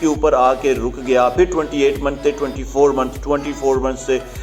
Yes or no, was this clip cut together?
no